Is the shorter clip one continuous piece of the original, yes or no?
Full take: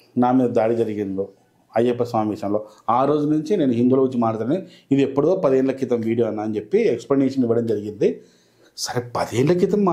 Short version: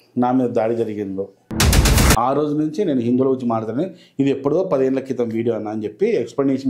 no